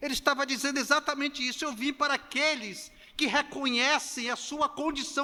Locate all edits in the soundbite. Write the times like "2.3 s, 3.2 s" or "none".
none